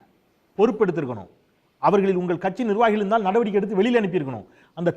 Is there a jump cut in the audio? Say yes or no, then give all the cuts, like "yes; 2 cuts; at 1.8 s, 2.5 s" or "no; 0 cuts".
no; 0 cuts